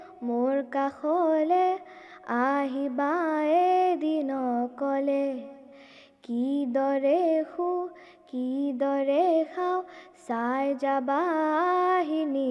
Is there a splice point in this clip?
no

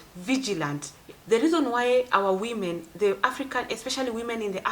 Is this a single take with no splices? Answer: no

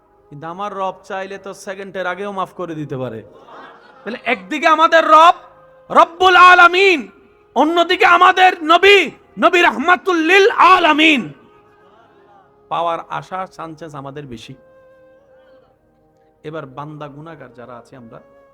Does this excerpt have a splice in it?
yes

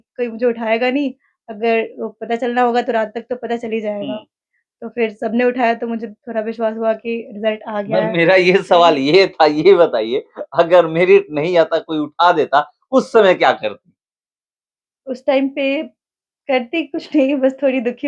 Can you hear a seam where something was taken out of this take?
no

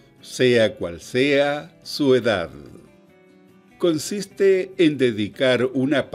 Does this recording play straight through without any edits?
yes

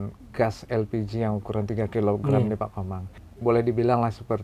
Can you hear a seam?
yes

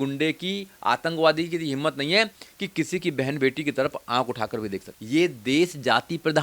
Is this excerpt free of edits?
no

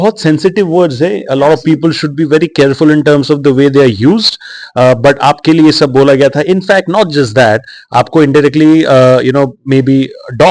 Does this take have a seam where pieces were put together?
no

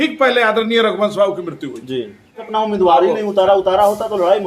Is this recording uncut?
no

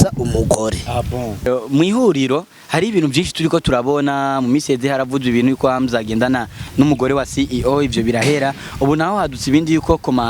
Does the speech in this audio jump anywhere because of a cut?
yes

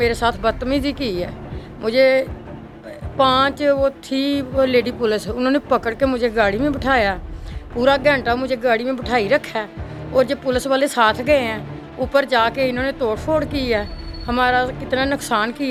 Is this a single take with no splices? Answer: yes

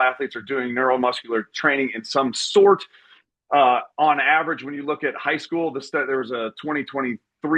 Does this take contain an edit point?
no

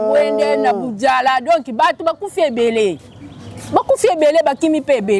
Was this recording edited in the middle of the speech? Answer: no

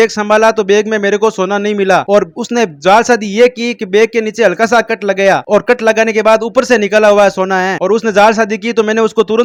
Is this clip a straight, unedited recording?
yes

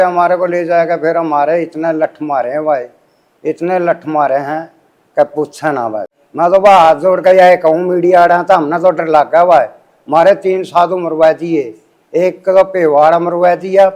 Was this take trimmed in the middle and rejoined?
yes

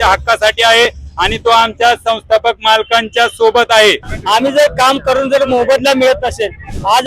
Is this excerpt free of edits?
no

